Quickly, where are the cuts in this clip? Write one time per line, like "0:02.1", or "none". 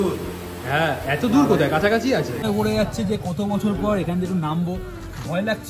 0:02.4